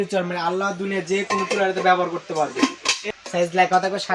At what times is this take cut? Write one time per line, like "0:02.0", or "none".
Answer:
0:03.0

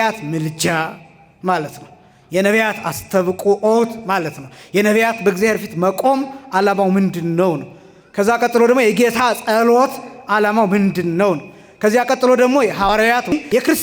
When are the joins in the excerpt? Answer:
0:12.9

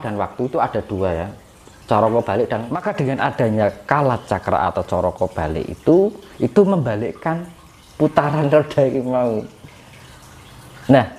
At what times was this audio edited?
0:02.9

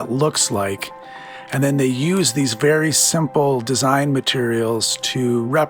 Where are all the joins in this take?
none

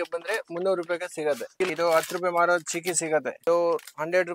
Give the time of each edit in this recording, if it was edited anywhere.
0:01.7
0:03.3

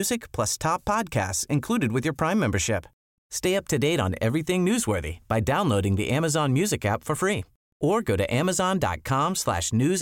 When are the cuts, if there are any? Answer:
none

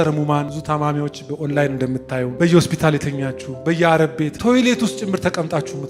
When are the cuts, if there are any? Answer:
0:02.3
0:04.3

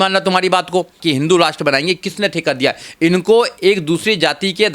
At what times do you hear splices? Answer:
0:01.0

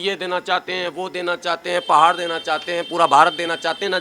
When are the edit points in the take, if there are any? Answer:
none

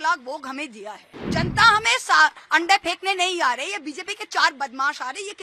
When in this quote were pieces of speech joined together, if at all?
0:01.3

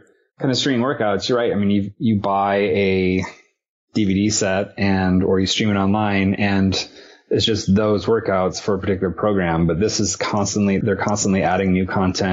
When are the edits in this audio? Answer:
0:01.9
0:10.8

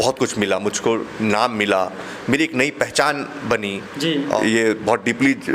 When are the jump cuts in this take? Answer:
0:04.4

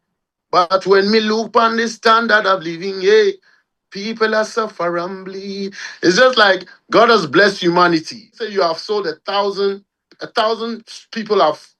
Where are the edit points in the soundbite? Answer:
0:08.4

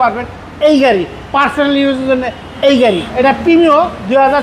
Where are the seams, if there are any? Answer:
0:03.1

